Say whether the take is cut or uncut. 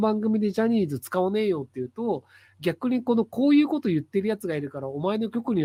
uncut